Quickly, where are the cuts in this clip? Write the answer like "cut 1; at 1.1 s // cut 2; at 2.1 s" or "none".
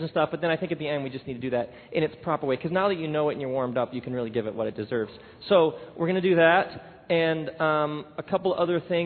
cut 1; at 2.2 s